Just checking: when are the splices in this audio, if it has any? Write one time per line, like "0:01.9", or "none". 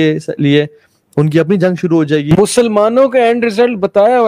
0:02.3